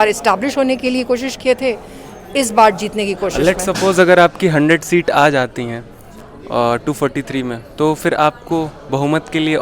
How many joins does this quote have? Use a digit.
1